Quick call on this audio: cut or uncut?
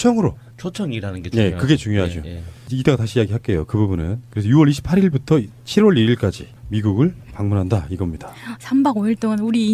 uncut